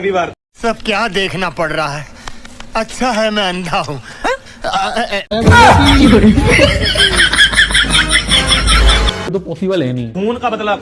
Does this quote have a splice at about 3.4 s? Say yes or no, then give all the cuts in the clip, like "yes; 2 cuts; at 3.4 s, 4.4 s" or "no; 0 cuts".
no; 1 cut; at 9.2 s